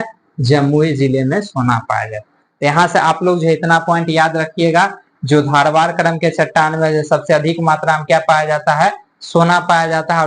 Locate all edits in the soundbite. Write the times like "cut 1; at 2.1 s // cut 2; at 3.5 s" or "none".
none